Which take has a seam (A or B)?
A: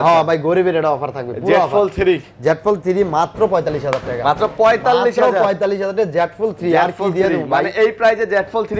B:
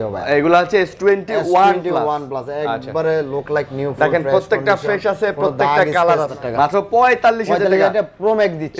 B